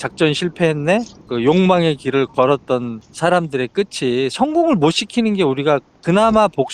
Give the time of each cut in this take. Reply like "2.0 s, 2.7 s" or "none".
1.2 s, 3.0 s